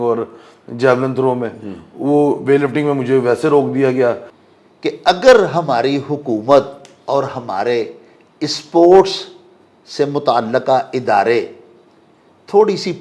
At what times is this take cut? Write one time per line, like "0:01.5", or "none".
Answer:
0:04.3